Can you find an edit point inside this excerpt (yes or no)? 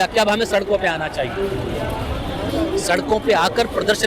no